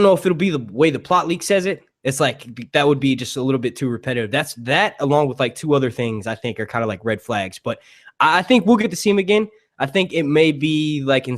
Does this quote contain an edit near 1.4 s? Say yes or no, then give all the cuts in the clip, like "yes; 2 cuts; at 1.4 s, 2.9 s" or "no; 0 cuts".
yes; 1 cut; at 1.4 s